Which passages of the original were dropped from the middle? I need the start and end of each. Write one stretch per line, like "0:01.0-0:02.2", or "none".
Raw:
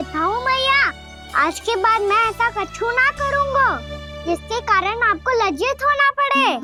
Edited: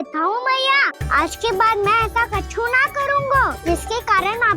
0:01.0-0:01.2
0:03.8-0:04.2

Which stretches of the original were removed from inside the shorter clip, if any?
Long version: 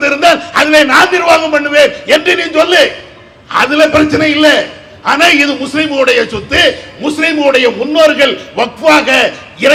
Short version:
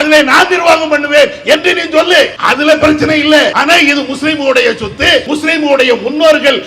0:03.0-0:03.5
0:04.7-0:05.1
0:06.8-0:07.0

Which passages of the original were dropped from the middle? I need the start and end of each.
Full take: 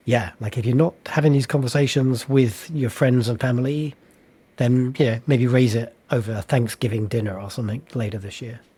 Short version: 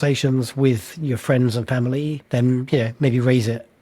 0:03.9-0:04.5

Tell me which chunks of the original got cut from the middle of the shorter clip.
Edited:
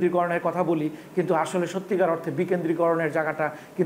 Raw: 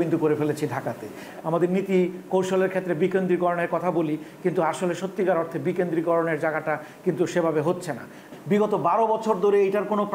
none

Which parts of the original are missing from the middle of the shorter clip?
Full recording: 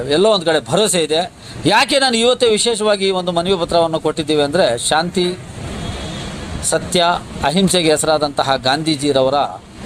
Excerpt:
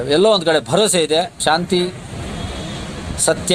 0:01.4-0:04.8

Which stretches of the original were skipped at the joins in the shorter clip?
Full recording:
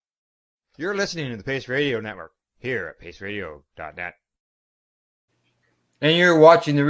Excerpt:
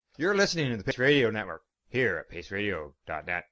0:01.5-0:01.6

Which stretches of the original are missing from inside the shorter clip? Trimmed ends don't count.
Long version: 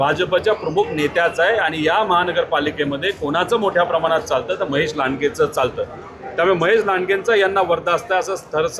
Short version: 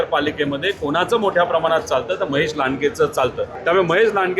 0:05.9-0:06.2

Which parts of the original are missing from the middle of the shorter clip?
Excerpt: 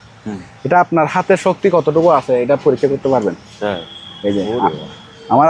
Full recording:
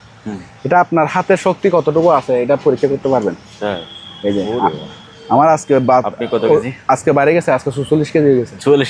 none

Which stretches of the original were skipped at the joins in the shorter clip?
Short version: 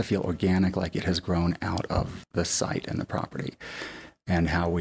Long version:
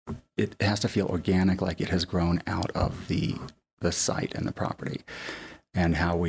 0:03.0-0:03.6

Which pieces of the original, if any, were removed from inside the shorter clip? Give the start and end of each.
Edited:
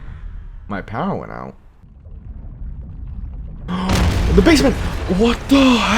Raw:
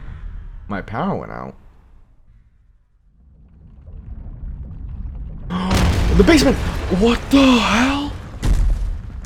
0:01.8-0:03.6

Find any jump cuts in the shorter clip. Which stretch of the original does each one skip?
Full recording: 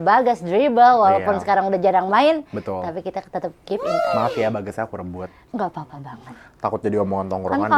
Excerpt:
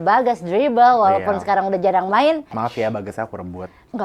0:02.6-0:04.2

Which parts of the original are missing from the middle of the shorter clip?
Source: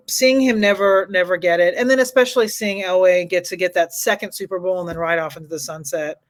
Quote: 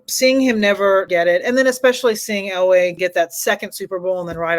0:01.1-0:01.4
0:03.3-0:03.5

